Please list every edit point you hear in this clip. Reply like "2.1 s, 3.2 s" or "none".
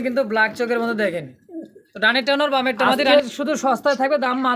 3.1 s